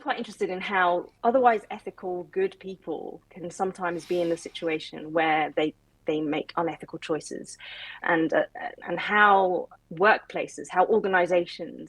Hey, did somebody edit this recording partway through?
yes; 1 cut; at 8.0 s

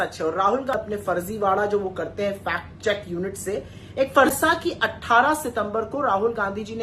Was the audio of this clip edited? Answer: yes; 2 cuts; at 0.7 s, 4.3 s

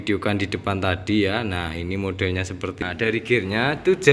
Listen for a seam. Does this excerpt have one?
yes; 1 cut; at 2.8 s

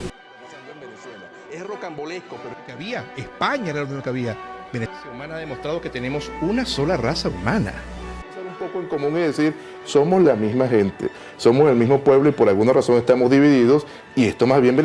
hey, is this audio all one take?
yes; 0 cuts

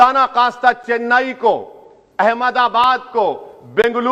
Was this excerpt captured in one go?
yes; 0 cuts

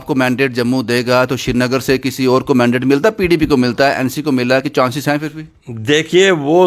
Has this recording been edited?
no; 0 cuts

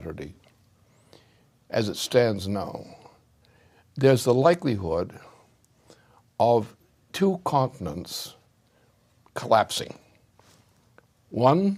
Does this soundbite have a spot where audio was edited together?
no; 0 cuts

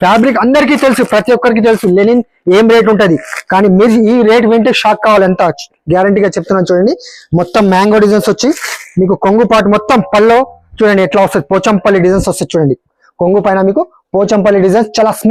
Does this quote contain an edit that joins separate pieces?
no; 0 cuts

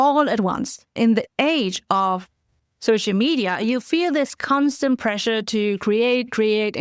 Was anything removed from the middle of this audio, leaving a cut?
yes; 1 cut; at 0.9 s

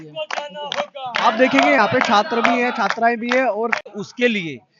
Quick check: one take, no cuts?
no; 1 cut; at 3.9 s

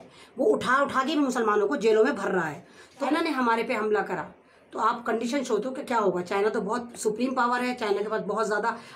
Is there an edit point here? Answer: yes; 1 cut; at 3.0 s

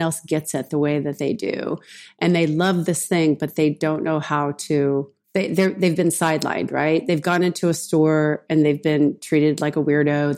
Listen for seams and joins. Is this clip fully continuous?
no; 1 cut; at 5.2 s

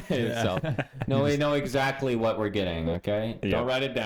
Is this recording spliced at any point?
no; 0 cuts

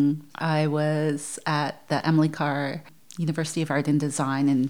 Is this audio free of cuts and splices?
yes; 0 cuts

